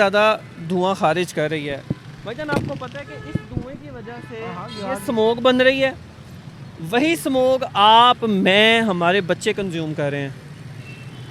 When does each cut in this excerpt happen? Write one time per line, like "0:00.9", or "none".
none